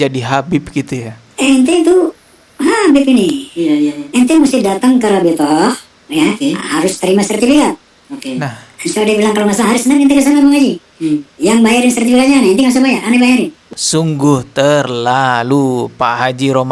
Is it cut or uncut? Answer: cut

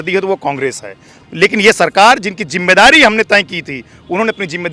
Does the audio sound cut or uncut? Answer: cut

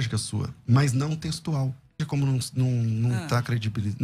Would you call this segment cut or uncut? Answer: cut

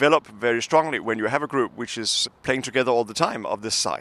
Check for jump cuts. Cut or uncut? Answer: cut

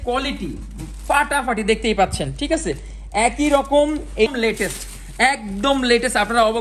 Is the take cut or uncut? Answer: cut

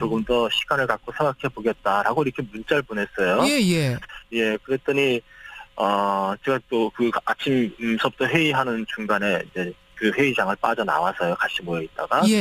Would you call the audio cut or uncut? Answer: cut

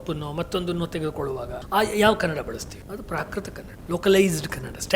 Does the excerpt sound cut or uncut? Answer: cut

